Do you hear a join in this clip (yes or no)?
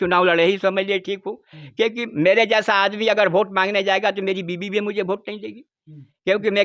no